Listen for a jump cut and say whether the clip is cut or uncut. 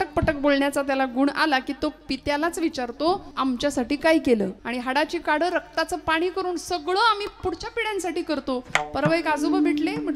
cut